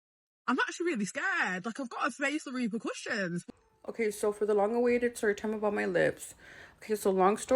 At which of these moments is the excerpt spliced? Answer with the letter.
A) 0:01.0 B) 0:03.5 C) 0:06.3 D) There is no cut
B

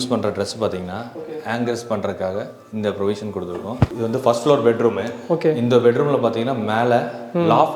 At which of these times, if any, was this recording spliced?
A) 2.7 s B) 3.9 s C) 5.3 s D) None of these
B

